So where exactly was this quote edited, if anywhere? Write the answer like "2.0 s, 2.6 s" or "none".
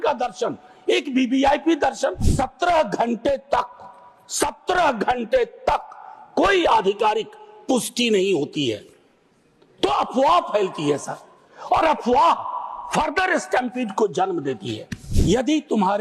2.3 s, 15.1 s